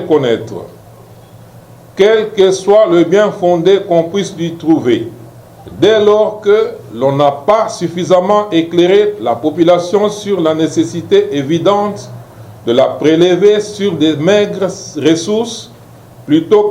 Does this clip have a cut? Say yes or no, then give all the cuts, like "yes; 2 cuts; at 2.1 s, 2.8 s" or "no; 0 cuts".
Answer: no; 0 cuts